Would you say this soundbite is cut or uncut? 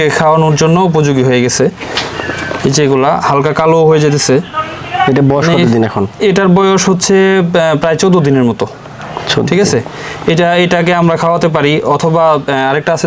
uncut